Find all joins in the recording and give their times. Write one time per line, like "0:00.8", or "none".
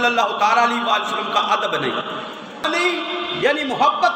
0:02.6